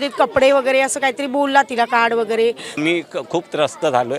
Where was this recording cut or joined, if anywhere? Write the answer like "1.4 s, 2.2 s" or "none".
2.8 s